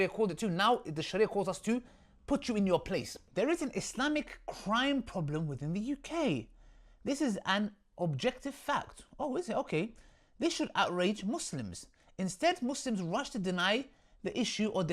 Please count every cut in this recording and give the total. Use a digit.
1